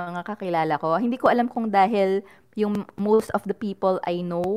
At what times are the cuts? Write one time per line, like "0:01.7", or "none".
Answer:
none

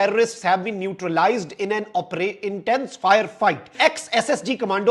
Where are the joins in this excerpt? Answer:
0:03.7

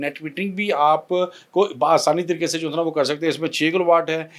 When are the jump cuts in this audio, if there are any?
none

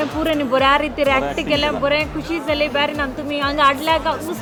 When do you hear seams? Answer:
none

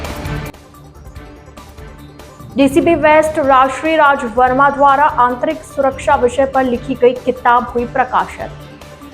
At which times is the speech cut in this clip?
0:00.9

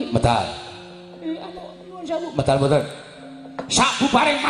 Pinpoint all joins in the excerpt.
none

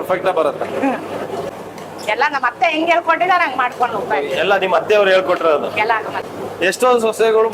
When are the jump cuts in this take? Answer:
0:06.2

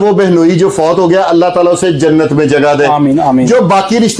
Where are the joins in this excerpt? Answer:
none

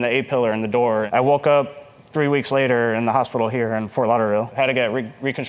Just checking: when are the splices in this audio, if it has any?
0:01.1
0:04.5

